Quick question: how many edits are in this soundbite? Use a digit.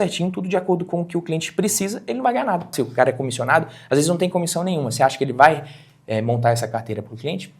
1